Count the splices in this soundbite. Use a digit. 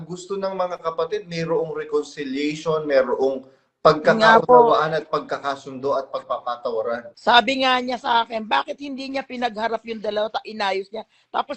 1